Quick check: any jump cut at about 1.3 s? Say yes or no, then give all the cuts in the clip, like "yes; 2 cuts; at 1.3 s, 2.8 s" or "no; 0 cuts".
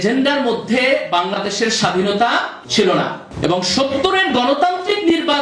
no; 2 cuts; at 2.6 s, 3.2 s